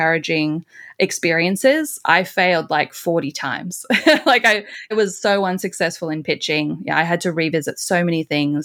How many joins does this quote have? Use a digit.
0